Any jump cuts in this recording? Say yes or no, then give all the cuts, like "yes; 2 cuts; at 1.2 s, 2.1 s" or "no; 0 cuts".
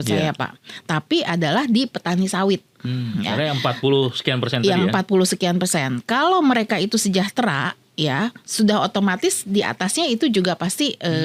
no; 0 cuts